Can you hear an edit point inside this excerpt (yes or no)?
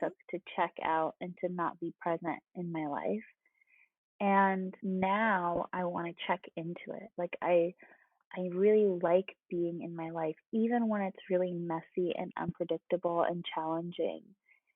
yes